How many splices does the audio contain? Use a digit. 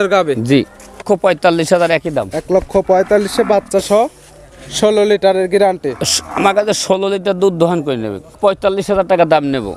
2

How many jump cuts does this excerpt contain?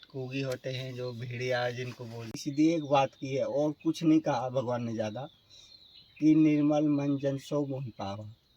1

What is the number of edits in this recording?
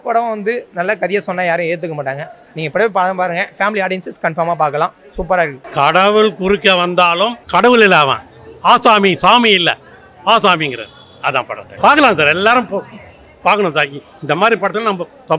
3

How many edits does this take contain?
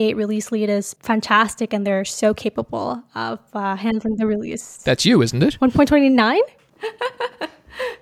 1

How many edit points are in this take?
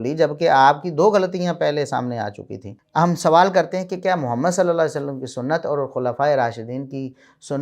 1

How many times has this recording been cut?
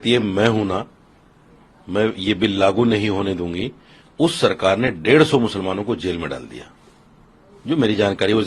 0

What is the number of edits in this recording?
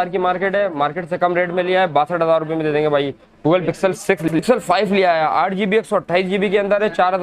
1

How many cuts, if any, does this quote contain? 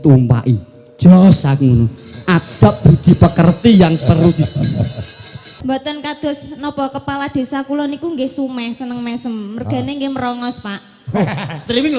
1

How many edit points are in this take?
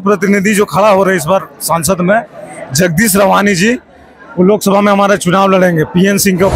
0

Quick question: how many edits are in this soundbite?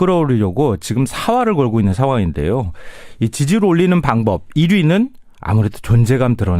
0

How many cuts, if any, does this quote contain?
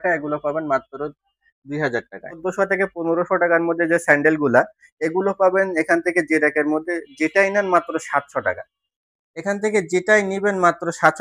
1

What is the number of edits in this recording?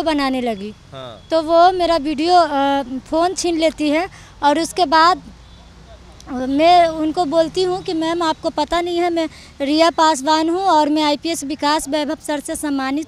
0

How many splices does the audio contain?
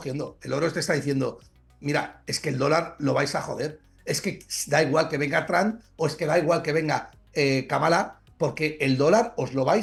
0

